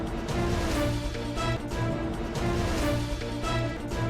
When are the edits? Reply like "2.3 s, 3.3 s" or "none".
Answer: 3.1 s